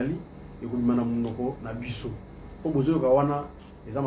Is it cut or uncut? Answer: uncut